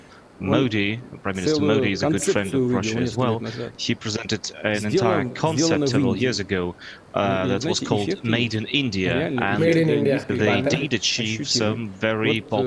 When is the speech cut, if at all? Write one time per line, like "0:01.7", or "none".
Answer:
none